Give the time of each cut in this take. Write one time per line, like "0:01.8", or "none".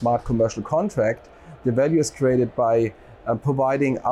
none